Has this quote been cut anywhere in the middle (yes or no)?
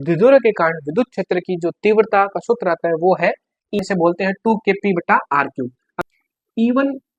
yes